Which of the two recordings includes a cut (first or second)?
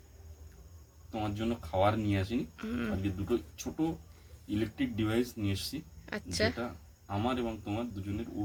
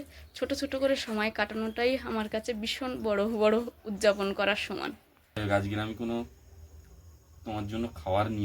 second